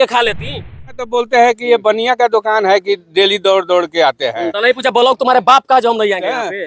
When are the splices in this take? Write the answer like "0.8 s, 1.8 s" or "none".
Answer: 1.0 s